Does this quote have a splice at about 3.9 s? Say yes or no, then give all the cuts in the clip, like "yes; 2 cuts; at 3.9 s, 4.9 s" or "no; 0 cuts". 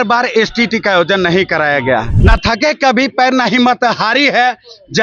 no; 1 cut; at 2.1 s